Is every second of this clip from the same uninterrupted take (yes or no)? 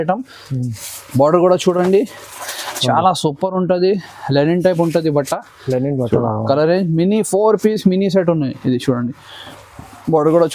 yes